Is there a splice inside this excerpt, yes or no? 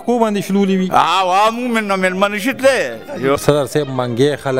yes